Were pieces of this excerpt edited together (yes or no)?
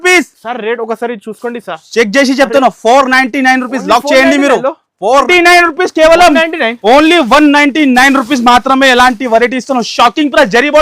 yes